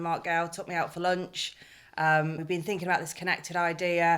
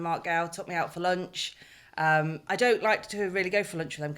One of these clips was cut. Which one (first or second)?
first